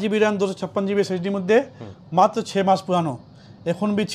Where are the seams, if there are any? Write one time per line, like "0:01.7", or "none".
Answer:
none